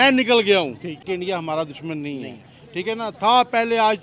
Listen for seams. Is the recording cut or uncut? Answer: cut